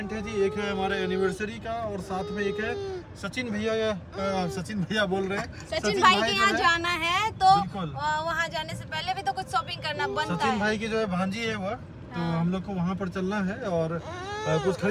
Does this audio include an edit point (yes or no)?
no